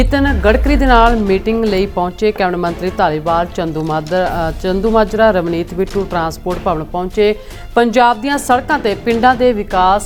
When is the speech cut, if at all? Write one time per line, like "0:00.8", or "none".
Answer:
none

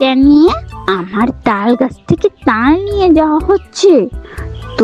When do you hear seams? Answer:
none

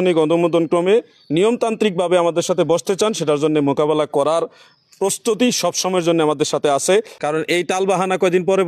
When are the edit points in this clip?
0:07.2

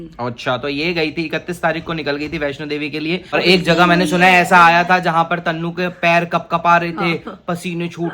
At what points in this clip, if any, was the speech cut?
0:03.3

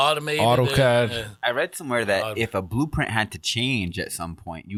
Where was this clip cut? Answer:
none

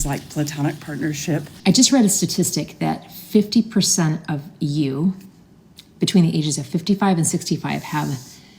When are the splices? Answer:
0:01.5

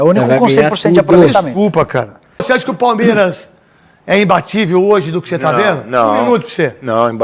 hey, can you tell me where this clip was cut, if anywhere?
0:02.4

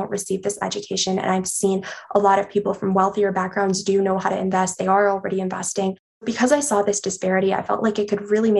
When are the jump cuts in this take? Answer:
0:06.3

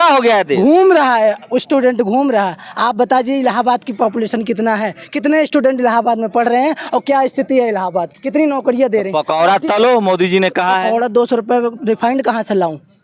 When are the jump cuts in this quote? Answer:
none

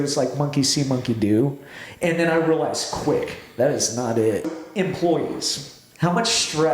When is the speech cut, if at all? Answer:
0:04.5

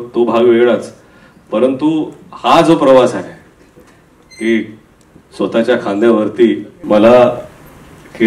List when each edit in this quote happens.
0:06.7

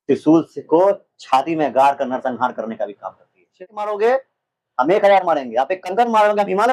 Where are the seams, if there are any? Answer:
0:03.6

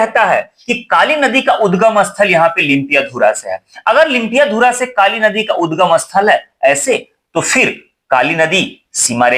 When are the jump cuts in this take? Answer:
none

